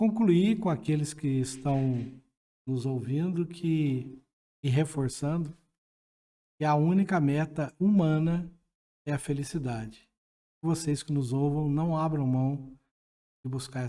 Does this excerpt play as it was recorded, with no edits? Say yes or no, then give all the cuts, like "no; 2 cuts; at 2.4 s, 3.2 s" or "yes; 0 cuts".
yes; 0 cuts